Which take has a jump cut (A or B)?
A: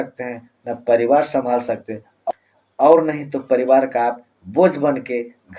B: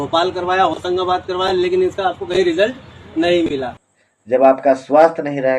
B